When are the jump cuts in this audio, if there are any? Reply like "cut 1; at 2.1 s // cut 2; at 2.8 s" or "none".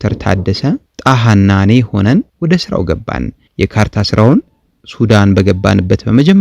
cut 1; at 0.9 s // cut 2; at 2.3 s